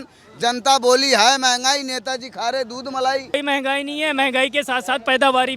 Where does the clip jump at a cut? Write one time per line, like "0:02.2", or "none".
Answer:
0:03.3